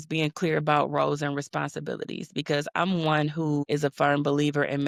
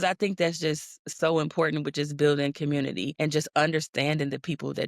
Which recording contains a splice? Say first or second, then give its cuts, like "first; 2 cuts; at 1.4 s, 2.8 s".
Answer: second; 1 cut; at 3.1 s